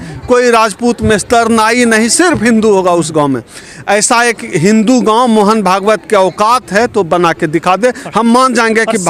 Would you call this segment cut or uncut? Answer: uncut